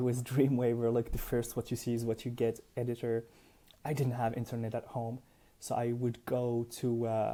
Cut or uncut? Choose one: uncut